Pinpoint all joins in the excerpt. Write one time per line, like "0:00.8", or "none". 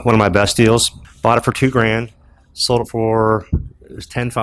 0:01.0

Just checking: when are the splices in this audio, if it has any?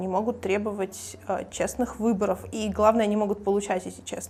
none

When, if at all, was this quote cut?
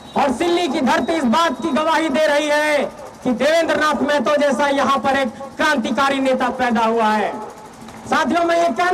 none

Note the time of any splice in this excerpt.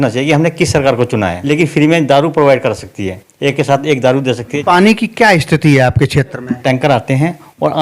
0:01.4
0:04.5
0:06.6

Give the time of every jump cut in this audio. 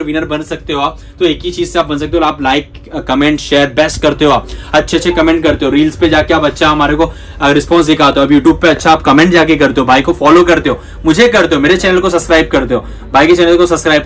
none

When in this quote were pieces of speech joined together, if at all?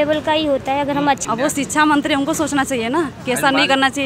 0:01.2

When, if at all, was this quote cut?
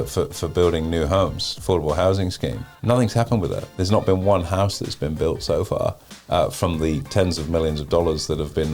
0:02.7
0:03.7

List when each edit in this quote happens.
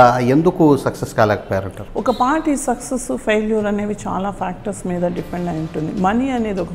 0:01.8

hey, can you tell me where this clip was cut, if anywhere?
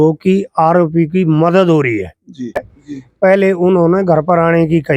0:02.7

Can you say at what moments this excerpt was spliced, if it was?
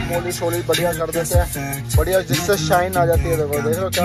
none

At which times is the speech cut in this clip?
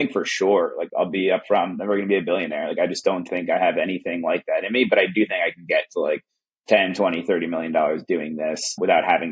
none

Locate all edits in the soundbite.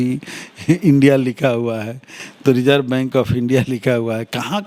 none

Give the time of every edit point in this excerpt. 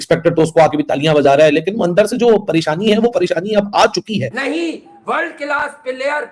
0:04.3

